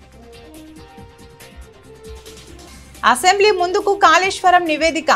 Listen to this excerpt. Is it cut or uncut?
uncut